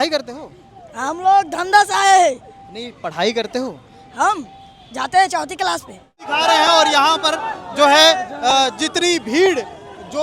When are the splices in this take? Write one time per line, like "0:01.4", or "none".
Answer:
0:06.2